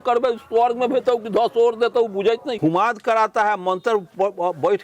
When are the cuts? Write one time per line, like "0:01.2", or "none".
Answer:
0:02.6